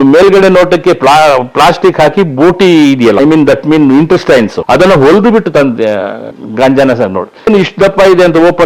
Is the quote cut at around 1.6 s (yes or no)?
no